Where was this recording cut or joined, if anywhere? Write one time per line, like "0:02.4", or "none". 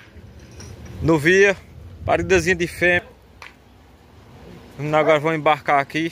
0:03.0